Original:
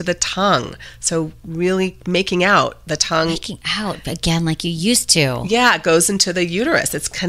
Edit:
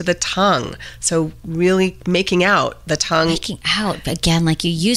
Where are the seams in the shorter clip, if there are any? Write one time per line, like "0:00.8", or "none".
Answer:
none